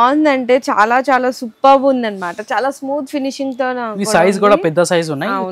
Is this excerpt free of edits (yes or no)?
yes